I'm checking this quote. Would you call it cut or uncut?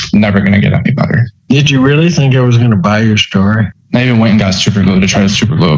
cut